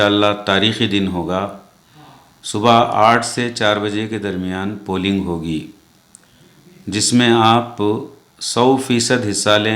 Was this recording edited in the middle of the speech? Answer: no; 0 cuts

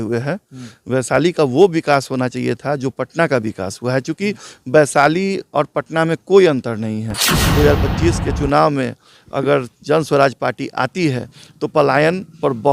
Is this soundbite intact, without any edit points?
no; 1 cut; at 7.3 s

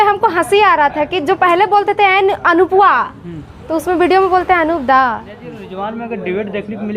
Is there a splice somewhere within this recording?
yes; 1 cut; at 5.6 s

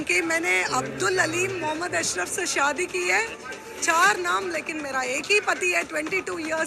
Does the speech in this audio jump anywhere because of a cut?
no; 0 cuts

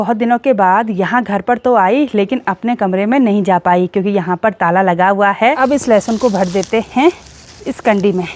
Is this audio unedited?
no; 1 cut; at 5.6 s

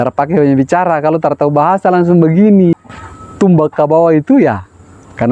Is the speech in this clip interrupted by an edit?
yes; 1 cut; at 2.7 s

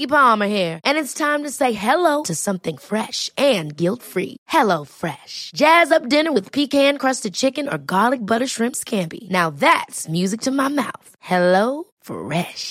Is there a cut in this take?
no; 0 cuts

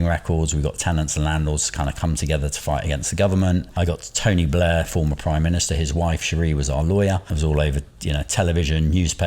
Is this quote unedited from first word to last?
no; 2 cuts; at 3.7 s, 7.3 s

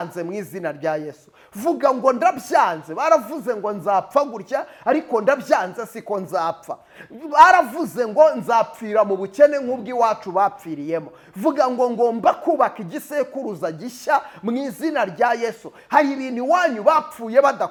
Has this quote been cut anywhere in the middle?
no; 0 cuts

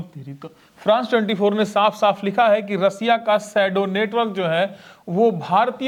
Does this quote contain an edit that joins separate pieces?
no; 0 cuts

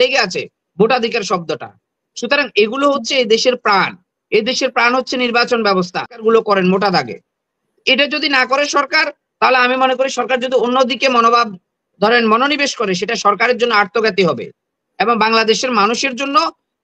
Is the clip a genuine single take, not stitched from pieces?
no; 1 cut; at 6.2 s

